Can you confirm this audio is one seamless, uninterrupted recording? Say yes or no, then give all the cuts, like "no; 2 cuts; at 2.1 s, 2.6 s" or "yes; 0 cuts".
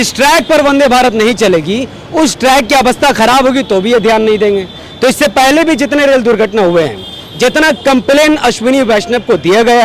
yes; 0 cuts